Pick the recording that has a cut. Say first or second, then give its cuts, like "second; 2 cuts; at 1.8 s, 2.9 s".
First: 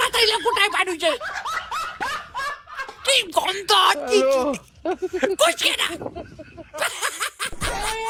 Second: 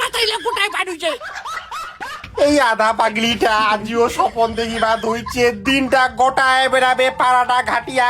second; 1 cut; at 2.2 s